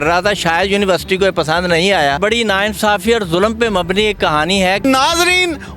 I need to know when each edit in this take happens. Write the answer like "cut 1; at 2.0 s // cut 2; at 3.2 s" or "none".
cut 1; at 2.2 s // cut 2; at 4.8 s

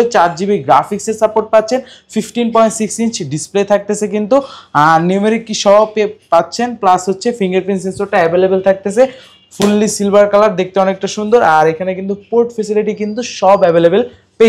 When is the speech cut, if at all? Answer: none

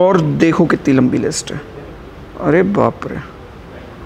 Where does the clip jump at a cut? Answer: none

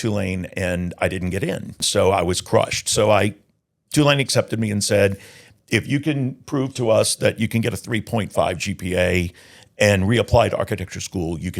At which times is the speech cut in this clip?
cut 1; at 1.8 s

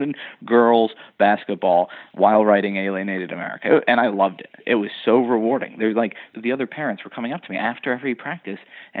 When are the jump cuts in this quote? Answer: cut 1; at 2.0 s // cut 2; at 4.5 s

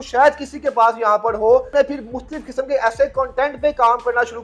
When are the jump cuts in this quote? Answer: cut 1; at 1.7 s

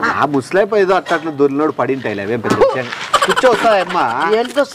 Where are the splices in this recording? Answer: cut 1; at 3.0 s

